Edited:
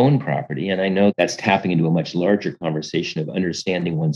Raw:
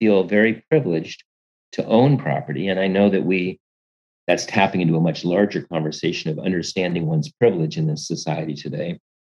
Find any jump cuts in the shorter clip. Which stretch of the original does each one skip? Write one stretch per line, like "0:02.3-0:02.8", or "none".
0:03.1-0:04.2